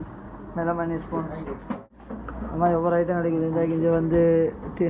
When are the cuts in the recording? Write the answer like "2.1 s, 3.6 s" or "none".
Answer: 2.0 s